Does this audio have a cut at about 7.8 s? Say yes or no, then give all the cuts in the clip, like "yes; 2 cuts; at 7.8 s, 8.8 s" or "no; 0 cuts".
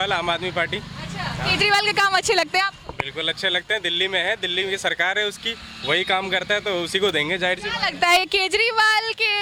no; 0 cuts